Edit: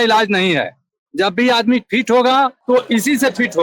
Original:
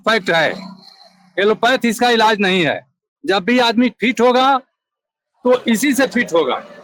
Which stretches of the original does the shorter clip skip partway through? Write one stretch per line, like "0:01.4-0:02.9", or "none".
0:04.7-0:05.3